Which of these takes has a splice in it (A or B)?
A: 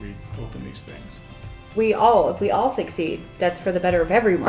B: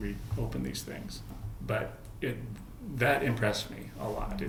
A